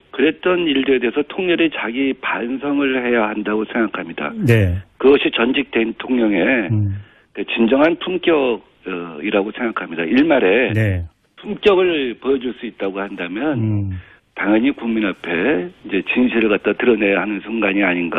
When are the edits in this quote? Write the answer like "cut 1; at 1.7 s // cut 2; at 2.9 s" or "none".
none